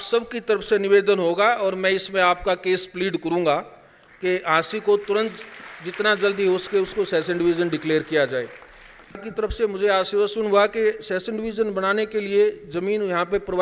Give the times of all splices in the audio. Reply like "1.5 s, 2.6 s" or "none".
9.3 s